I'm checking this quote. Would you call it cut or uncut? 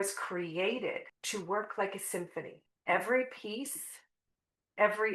cut